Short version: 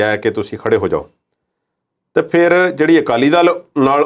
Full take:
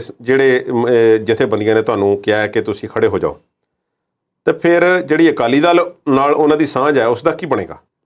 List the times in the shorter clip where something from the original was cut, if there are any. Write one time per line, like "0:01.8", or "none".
none